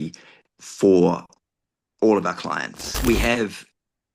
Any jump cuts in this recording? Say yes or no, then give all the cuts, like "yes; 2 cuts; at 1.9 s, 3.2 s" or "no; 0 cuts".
yes; 1 cut; at 2.9 s